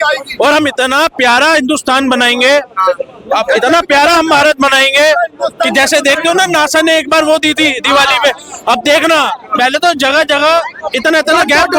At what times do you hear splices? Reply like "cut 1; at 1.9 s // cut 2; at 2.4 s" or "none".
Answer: none